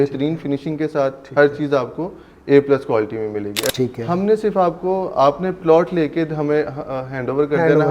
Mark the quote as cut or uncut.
cut